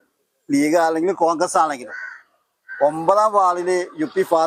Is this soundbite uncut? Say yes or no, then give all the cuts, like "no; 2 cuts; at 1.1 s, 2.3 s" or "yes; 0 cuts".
yes; 0 cuts